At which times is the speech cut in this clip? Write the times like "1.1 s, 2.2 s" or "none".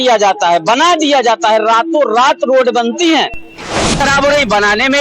4.0 s